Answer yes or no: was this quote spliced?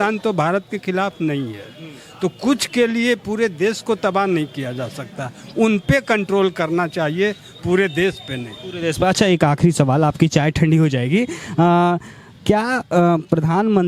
no